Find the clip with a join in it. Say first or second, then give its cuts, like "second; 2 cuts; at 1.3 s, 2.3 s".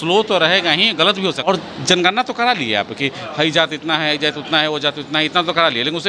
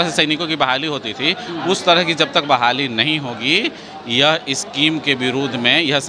first; 1 cut; at 1.5 s